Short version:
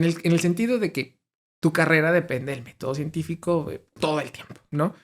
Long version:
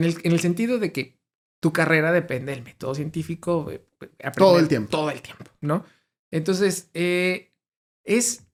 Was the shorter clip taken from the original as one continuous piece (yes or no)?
no